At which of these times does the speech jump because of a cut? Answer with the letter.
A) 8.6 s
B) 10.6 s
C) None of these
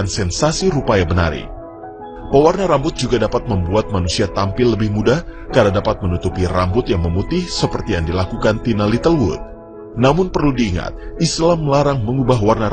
A